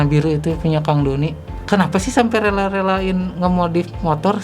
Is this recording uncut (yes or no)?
no